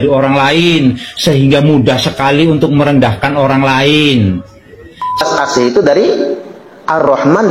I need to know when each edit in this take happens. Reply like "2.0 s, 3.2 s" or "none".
5.2 s